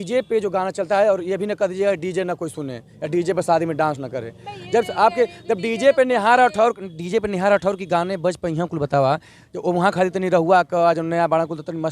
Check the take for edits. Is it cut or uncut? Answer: uncut